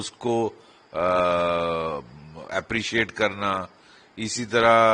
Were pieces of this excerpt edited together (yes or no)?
no